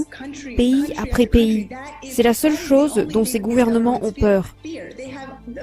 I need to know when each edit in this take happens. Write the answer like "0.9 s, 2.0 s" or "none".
4.5 s